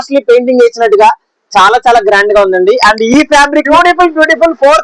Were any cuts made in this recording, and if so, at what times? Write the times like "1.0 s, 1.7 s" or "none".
3.7 s